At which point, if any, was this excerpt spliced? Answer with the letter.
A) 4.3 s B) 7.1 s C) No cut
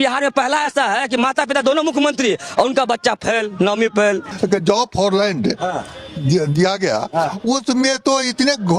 A